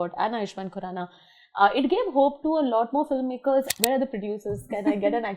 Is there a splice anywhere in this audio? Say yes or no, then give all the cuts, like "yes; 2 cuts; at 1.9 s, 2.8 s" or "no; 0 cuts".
yes; 1 cut; at 3.7 s